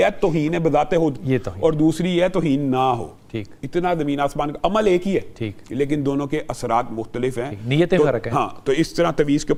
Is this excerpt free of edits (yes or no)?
yes